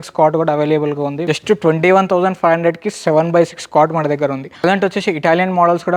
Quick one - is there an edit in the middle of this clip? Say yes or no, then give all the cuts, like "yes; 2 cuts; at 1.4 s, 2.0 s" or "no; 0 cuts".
yes; 2 cuts; at 1.2 s, 4.6 s